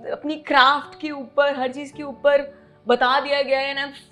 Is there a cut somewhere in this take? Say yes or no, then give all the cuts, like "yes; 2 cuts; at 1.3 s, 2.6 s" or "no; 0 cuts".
no; 0 cuts